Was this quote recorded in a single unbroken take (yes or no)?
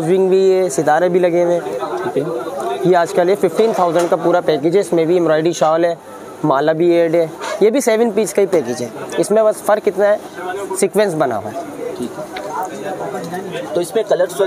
yes